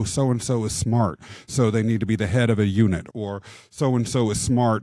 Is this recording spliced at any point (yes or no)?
yes